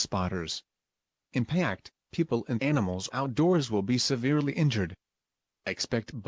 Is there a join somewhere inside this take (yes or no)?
no